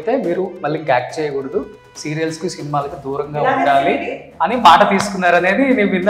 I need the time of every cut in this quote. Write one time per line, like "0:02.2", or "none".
none